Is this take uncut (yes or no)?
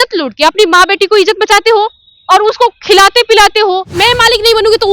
no